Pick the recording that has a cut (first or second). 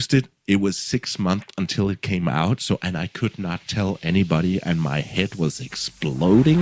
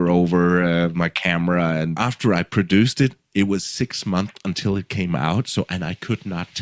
second